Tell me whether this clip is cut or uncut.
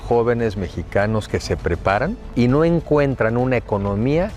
cut